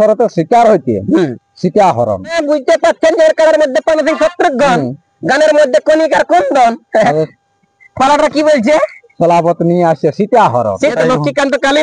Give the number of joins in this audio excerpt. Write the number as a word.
two